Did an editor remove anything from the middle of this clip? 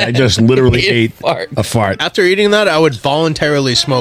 yes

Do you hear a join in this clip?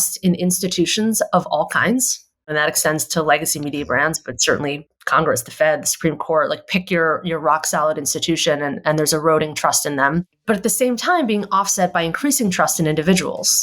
yes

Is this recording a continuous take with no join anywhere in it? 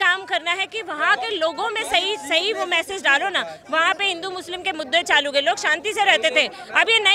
yes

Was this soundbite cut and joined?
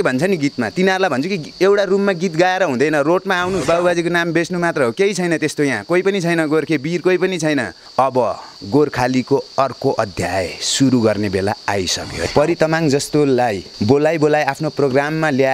yes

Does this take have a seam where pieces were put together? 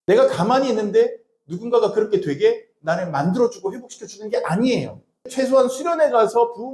yes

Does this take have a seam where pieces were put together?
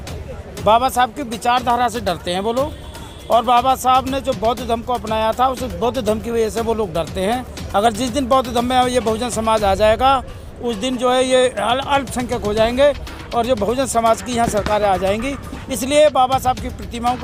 no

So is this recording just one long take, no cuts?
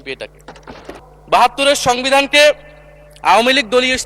no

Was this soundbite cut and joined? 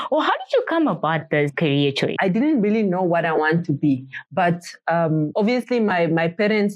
yes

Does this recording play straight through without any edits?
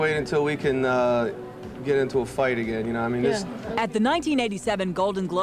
yes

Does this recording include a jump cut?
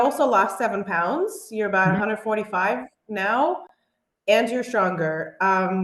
no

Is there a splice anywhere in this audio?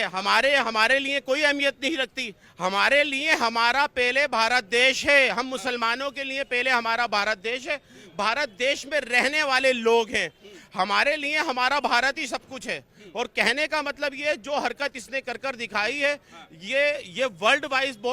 no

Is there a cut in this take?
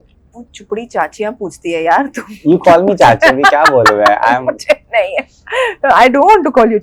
no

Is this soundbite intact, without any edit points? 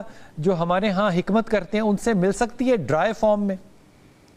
yes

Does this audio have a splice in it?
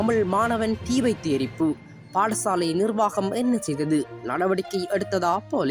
no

